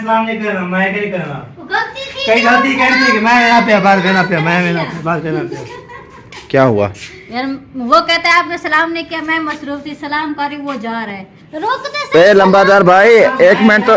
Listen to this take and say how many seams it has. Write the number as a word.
zero